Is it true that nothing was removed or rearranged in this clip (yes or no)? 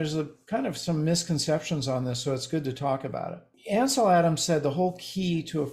no